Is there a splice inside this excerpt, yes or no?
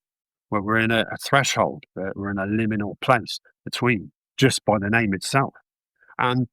yes